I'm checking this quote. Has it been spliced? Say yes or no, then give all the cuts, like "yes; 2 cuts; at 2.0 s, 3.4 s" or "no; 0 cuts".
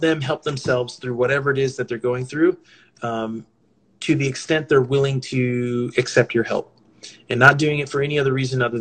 no; 0 cuts